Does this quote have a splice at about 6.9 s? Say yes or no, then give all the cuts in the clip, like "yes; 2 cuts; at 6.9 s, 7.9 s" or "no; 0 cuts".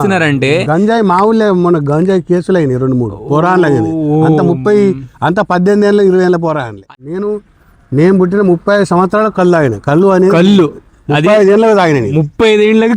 yes; 1 cut; at 6.9 s